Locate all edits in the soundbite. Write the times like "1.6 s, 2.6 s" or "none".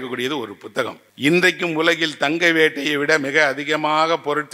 1.0 s